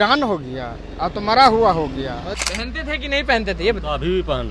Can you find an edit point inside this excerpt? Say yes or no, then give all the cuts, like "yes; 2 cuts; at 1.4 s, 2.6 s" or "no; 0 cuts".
yes; 1 cut; at 2.4 s